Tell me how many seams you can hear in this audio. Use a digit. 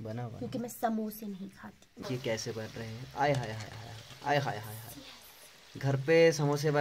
1